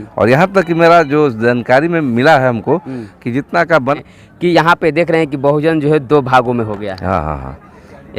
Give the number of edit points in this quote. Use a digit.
1